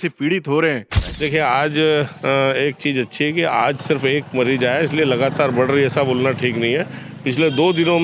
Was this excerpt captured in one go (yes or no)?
no